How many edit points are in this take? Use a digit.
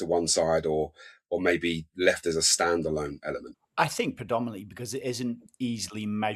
1